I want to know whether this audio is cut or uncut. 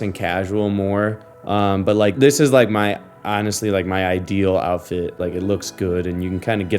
cut